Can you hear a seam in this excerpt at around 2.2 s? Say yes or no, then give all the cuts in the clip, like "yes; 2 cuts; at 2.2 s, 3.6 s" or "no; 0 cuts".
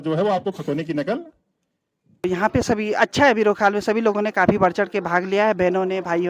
yes; 1 cut; at 2.2 s